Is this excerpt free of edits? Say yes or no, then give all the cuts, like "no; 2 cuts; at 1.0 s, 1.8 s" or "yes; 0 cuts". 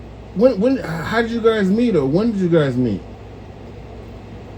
yes; 0 cuts